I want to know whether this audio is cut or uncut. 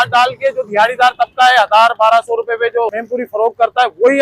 cut